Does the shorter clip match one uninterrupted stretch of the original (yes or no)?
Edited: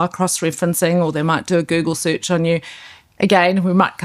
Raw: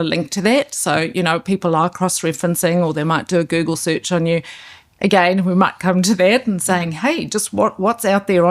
yes